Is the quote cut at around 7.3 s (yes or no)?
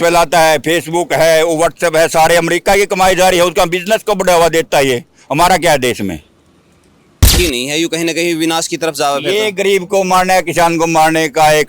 yes